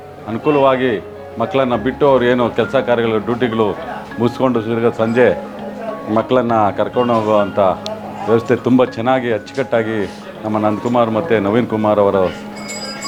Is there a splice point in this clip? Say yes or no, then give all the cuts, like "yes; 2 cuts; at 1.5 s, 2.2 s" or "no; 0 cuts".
no; 0 cuts